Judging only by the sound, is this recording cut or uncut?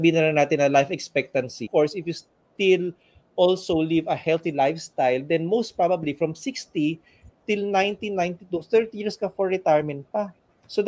cut